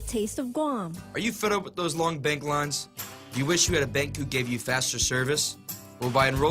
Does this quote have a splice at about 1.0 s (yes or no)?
yes